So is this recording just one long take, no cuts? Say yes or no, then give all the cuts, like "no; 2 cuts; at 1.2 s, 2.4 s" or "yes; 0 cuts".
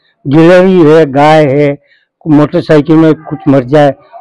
yes; 0 cuts